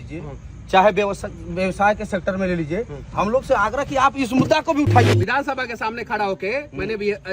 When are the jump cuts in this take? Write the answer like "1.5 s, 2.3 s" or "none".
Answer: 5.0 s

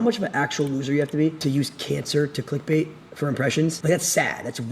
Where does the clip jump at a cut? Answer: 1.5 s, 3.8 s

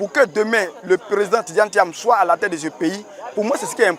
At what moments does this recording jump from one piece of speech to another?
none

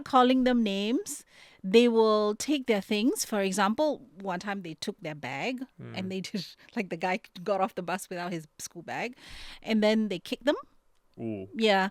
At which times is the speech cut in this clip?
none

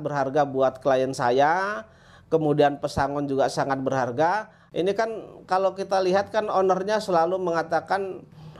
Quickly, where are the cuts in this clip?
4.6 s

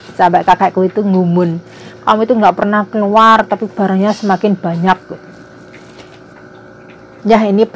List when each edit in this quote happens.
6.3 s

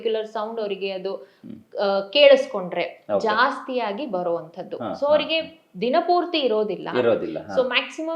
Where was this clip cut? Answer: none

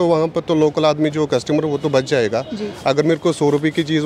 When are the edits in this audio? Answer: none

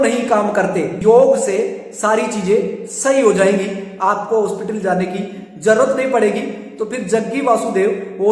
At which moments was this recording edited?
1.0 s

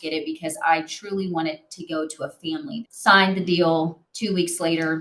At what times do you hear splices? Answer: 2.7 s, 4.1 s

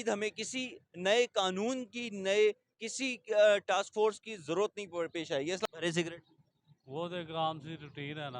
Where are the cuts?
5.6 s

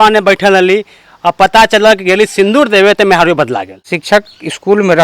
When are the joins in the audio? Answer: 3.9 s

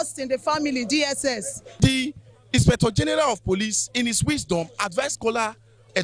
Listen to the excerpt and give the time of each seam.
1.7 s

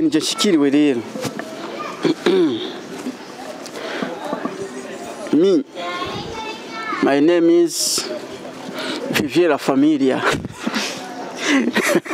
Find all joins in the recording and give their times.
none

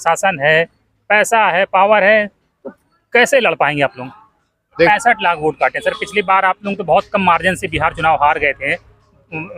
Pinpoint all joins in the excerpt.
4.9 s

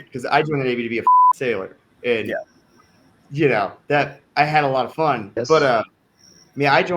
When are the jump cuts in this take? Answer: 4.9 s

